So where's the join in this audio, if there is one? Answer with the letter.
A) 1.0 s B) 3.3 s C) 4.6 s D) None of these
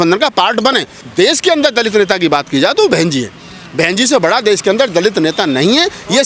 A